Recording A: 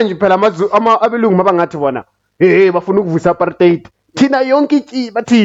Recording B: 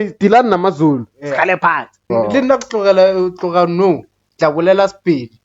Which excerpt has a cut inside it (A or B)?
B